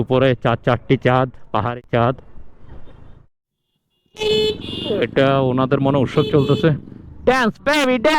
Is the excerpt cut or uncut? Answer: cut